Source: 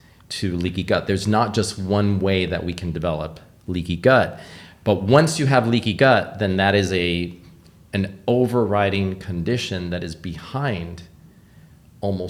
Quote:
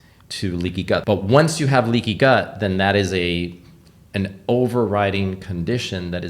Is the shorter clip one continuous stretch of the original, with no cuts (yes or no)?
no